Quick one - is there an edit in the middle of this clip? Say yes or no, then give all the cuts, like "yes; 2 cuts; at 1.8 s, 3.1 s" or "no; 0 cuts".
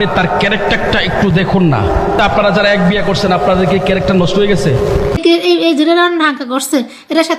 yes; 1 cut; at 5.2 s